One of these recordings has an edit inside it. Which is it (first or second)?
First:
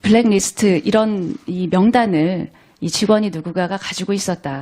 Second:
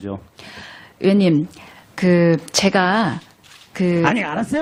first